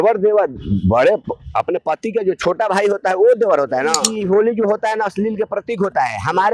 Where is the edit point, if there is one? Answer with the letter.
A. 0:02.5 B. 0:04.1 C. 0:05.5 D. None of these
B